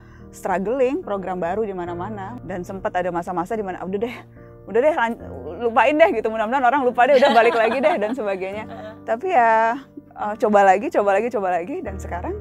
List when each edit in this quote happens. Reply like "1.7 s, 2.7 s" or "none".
2.3 s